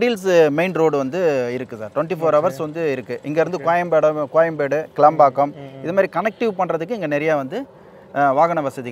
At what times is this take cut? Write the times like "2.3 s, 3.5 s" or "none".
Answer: none